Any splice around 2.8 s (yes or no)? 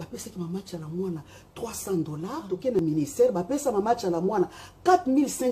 yes